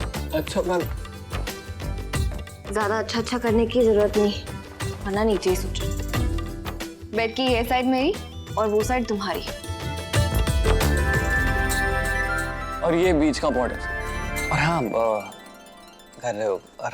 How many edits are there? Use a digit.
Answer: 2